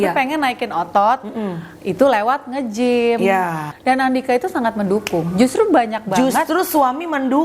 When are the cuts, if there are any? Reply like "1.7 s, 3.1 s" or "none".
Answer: 3.6 s